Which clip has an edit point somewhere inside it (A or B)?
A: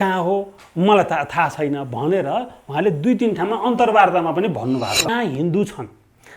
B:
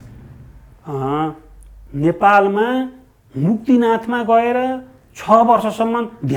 A